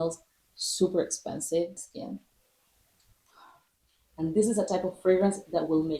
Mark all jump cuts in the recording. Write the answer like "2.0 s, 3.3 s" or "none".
1.8 s, 4.0 s